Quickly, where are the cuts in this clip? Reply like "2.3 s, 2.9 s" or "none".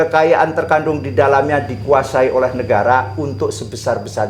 none